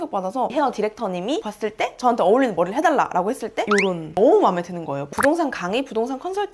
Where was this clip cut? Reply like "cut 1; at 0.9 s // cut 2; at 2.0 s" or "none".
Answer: cut 1; at 4.1 s // cut 2; at 5.0 s